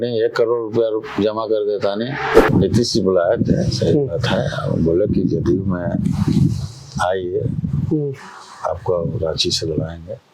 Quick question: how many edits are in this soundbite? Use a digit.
1